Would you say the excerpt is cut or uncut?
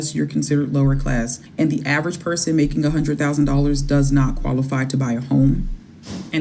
cut